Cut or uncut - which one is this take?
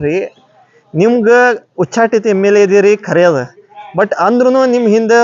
uncut